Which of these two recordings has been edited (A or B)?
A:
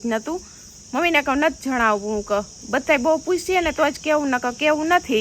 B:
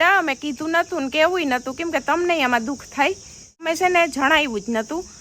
B